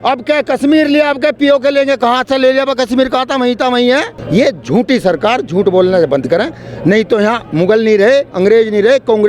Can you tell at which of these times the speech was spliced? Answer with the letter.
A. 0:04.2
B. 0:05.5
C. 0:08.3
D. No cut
A